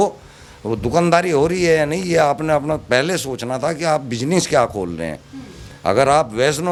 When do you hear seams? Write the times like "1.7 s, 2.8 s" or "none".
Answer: none